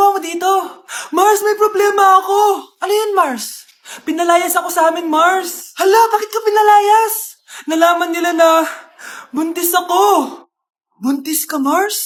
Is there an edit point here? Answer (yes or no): no